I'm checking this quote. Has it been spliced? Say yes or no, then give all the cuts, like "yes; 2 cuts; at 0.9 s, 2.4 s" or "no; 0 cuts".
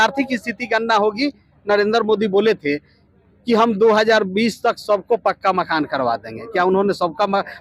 no; 0 cuts